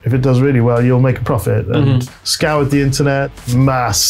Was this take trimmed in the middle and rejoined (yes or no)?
yes